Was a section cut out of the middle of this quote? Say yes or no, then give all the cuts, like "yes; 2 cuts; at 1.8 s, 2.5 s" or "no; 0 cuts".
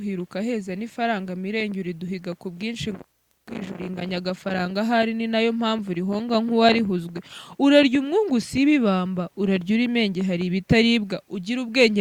no; 0 cuts